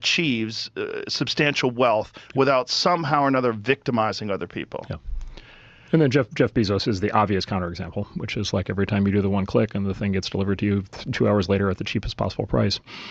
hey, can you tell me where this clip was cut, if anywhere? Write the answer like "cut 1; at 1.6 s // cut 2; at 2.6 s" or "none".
none